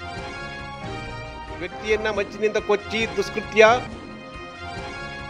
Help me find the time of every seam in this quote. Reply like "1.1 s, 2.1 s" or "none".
0.9 s